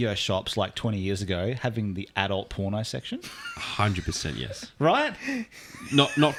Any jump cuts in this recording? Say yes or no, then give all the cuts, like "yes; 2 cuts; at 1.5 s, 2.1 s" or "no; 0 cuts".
no; 0 cuts